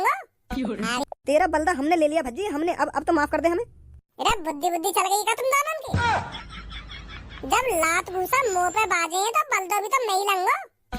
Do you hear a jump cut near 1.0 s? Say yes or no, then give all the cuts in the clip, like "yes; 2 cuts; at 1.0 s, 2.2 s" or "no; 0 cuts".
yes; 1 cut; at 1.0 s